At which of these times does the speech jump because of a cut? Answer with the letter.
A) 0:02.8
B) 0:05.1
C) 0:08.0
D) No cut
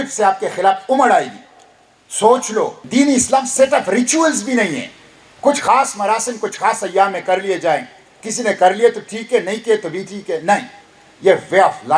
A